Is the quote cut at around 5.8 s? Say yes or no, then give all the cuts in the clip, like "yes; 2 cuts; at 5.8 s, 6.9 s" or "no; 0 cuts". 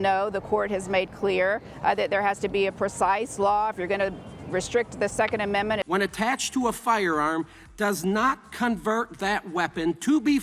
yes; 1 cut; at 5.8 s